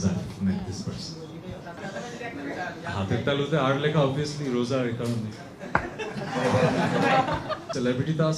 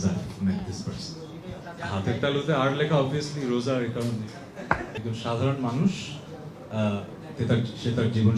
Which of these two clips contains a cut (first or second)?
second